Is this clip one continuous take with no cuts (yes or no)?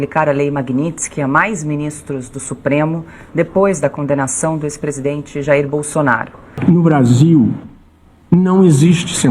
no